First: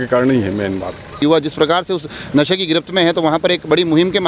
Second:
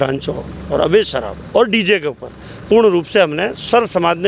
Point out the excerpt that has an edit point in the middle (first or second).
first